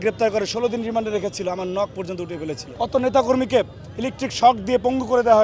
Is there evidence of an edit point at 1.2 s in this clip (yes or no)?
no